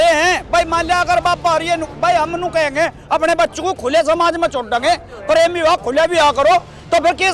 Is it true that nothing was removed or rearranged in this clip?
yes; 0 cuts

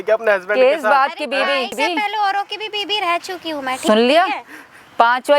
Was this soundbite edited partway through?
yes; 2 cuts; at 1.7 s, 3.7 s

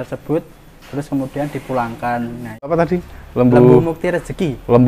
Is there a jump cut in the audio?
yes; 1 cut; at 2.7 s

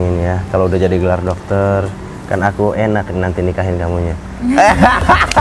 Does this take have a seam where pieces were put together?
no; 0 cuts

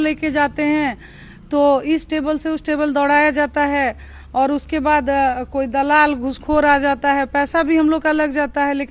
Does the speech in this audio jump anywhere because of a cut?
no; 0 cuts

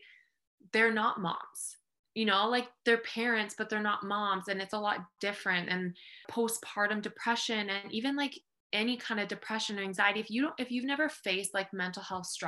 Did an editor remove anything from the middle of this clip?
yes; 1 cut; at 6.3 s

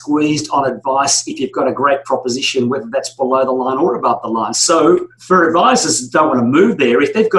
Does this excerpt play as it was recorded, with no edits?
no; 1 cut; at 4.5 s

